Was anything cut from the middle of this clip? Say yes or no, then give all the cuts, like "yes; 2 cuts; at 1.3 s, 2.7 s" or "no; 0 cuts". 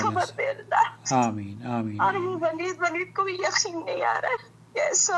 no; 0 cuts